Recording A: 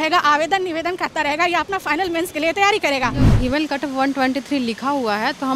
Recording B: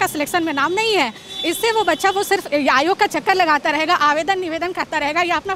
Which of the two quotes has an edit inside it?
A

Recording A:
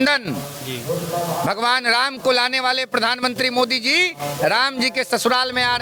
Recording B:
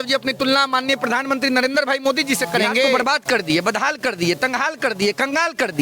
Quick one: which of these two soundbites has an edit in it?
B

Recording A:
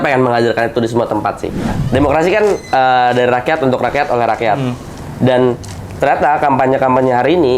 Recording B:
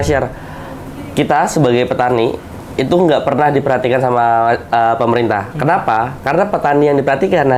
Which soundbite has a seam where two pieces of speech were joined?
A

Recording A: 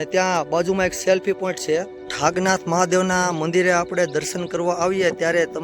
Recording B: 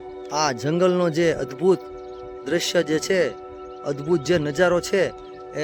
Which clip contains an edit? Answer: A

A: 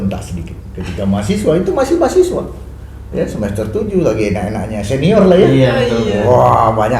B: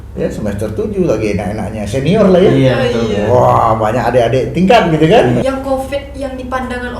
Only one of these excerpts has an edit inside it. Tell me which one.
B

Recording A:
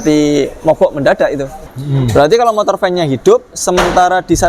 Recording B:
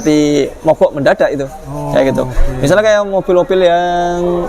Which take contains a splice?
A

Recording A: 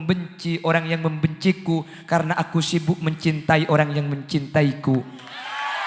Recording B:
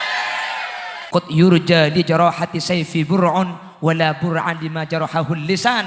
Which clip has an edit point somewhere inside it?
B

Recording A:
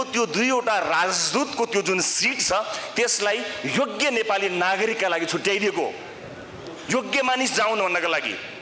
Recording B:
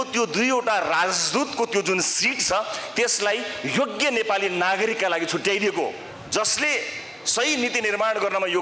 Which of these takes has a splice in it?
B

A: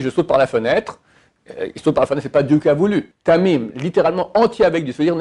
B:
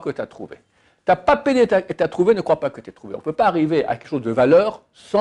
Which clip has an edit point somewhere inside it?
A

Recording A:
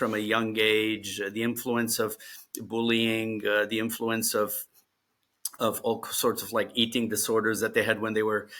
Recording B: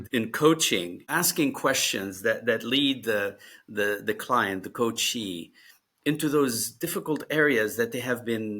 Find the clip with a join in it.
B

